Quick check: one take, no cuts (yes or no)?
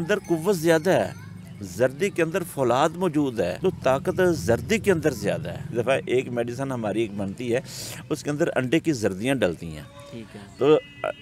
no